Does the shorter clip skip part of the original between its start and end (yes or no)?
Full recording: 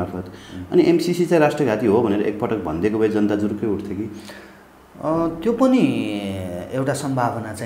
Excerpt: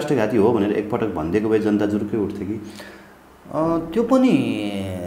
no